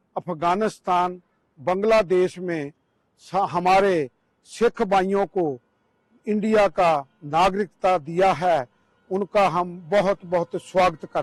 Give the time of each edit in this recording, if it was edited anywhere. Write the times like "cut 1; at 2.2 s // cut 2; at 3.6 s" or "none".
none